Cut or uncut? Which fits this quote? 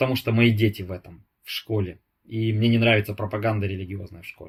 uncut